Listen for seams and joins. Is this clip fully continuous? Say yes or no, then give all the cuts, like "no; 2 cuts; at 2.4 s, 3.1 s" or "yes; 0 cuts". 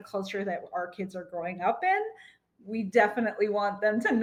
yes; 0 cuts